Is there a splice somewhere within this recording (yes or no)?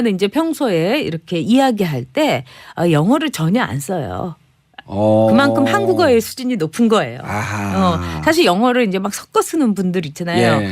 yes